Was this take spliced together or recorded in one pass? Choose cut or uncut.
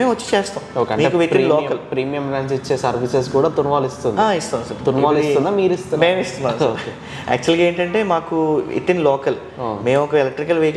uncut